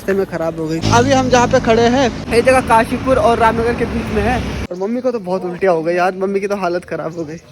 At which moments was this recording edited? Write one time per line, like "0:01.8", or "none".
0:00.8
0:02.2
0:04.6